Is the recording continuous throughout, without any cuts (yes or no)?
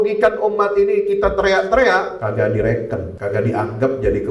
no